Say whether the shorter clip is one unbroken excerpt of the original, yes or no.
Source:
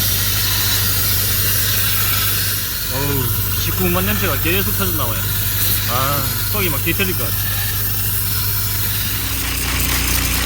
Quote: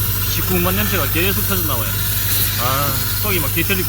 yes